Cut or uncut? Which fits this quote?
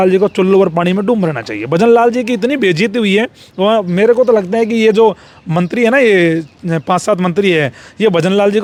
uncut